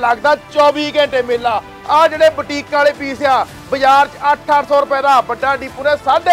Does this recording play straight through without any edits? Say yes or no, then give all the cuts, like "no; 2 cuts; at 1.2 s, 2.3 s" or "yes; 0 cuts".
no; 1 cut; at 1.7 s